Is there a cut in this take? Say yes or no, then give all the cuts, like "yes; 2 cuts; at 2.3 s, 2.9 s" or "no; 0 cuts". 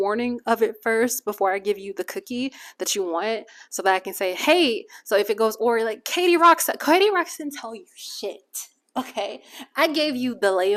no; 0 cuts